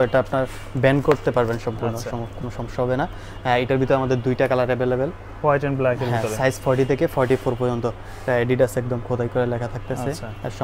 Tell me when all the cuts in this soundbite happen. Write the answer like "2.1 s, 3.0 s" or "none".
none